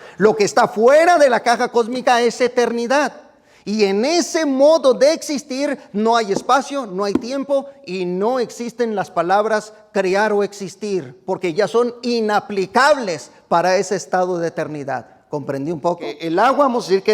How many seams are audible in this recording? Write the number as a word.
one